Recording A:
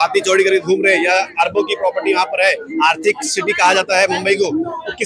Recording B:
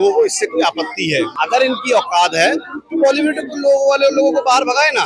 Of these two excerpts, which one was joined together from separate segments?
B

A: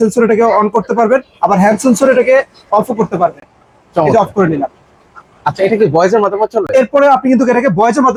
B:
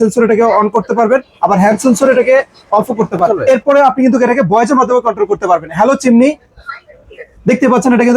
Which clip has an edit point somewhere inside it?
B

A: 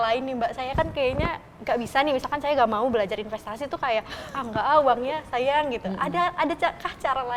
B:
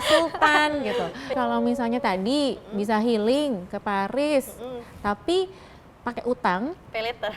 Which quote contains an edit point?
B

